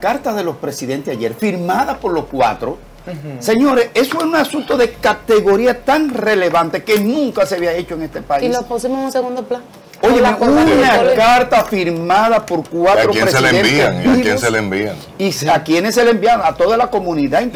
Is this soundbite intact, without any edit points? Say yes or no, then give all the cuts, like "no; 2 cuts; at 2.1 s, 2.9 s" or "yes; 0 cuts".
yes; 0 cuts